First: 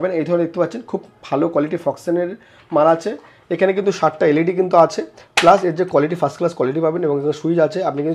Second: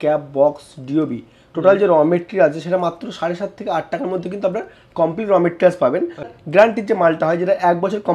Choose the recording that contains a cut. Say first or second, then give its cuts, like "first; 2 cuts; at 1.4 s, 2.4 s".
second; 1 cut; at 6.3 s